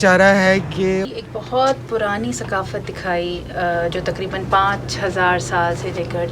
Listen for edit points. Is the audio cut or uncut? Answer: cut